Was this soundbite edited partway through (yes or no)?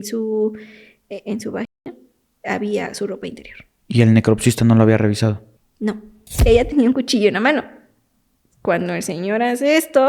yes